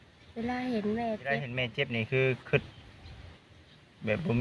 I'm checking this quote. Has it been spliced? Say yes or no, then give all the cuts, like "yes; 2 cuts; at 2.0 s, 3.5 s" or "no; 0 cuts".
yes; 1 cut; at 1.6 s